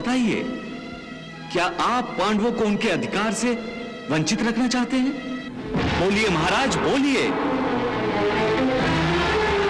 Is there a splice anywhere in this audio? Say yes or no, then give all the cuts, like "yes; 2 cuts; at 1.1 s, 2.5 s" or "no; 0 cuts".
no; 0 cuts